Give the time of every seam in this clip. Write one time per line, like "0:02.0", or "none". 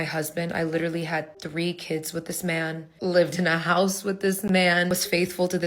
0:02.9
0:04.9